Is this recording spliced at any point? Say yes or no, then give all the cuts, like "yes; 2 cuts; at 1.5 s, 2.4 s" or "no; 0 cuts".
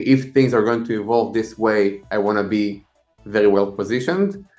no; 0 cuts